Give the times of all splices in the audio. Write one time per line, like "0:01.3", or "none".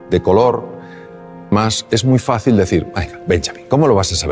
0:01.5